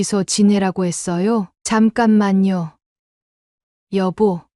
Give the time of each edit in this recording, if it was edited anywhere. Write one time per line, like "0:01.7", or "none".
0:01.5
0:02.8

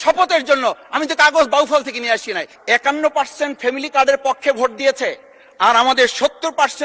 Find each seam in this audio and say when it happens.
0:02.5

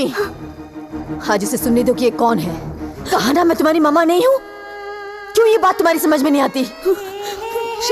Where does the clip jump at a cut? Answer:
0:02.9
0:06.7

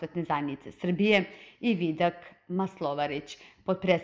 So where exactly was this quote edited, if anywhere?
0:01.7

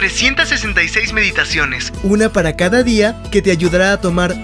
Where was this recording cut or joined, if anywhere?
none

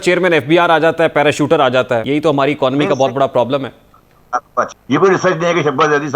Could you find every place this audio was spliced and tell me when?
0:02.0
0:04.8

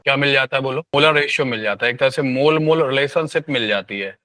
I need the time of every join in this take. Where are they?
0:00.9

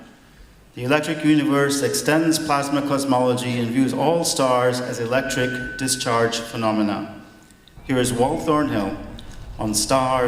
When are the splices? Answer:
none

